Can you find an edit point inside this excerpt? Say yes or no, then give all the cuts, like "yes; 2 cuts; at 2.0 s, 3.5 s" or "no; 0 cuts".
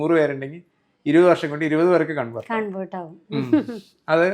no; 0 cuts